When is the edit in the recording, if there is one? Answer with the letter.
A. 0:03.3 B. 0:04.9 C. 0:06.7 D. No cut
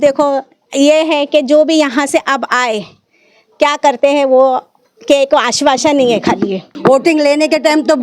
C